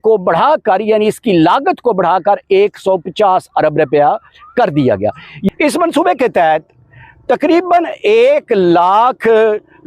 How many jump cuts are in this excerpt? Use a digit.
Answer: 1